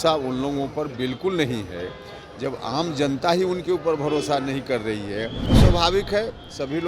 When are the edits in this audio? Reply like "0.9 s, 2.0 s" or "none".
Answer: 5.4 s